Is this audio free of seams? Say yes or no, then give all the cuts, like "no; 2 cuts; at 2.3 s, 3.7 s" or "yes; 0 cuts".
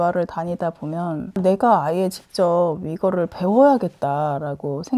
no; 1 cut; at 1.4 s